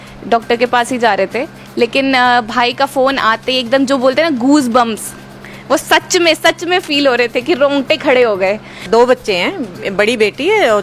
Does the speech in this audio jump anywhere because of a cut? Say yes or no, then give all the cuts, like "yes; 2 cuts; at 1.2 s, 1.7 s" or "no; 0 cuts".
yes; 1 cut; at 8.8 s